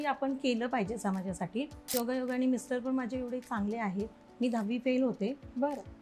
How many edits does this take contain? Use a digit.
1